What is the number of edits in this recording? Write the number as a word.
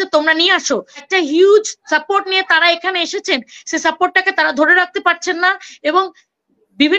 one